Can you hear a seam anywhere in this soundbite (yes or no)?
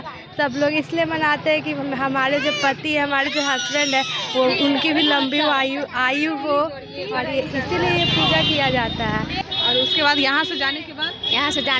yes